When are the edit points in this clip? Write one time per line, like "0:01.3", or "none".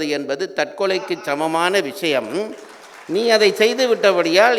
none